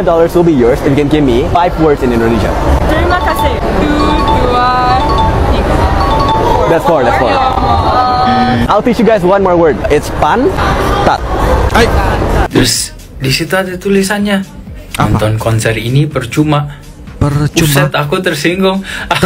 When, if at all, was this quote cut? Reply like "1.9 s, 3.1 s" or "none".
12.5 s